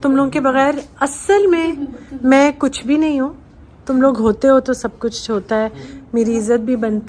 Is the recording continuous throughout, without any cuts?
yes; 0 cuts

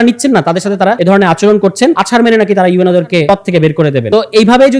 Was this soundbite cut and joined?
yes; 4 cuts; at 1.0 s, 2.0 s, 3.3 s, 4.1 s

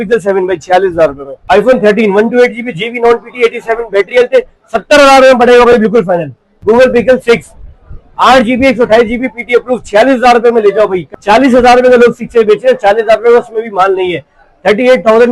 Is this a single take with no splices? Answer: no; 3 cuts; at 1.3 s, 6.5 s, 11.1 s

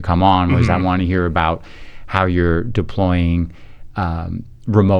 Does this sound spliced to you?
no; 0 cuts

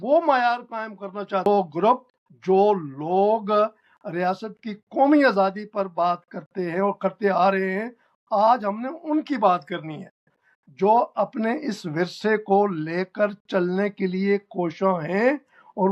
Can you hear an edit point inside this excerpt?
yes; 2 cuts; at 1.5 s, 10.4 s

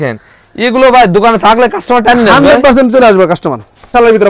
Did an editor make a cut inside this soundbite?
no; 0 cuts

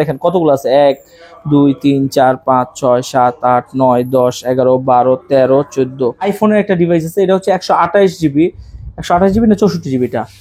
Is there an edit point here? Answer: yes; 1 cut; at 6.2 s

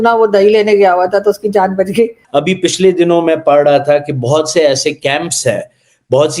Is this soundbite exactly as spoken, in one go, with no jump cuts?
no; 1 cut; at 2.2 s

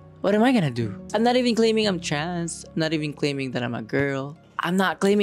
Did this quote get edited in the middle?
yes; 1 cut; at 1.0 s

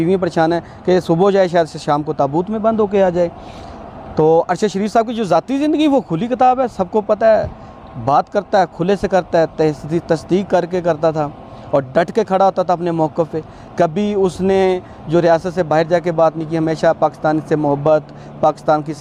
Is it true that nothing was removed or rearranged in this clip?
yes; 0 cuts

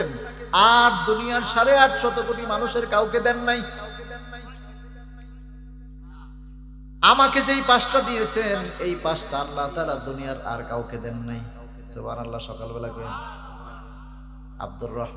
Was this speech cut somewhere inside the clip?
no; 0 cuts

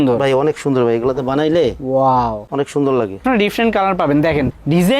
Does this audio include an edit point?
yes; 1 cut; at 3.2 s

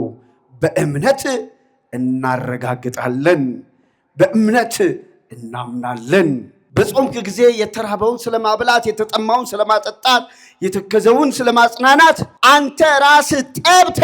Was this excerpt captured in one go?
no; 2 cuts; at 6.6 s, 12.3 s

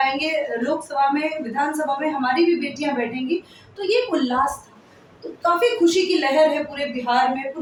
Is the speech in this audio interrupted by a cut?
no; 0 cuts

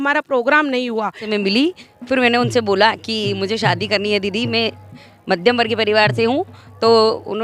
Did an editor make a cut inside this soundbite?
yes; 1 cut; at 1.2 s

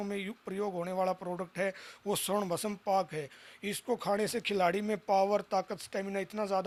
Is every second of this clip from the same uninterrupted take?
yes; 0 cuts

